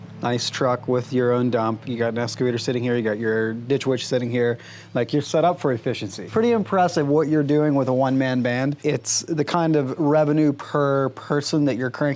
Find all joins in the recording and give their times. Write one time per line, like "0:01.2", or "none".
0:01.8
0:06.2